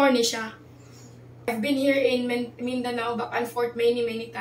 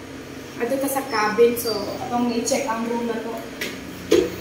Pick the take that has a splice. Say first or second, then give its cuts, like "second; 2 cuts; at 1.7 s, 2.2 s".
first; 1 cut; at 1.5 s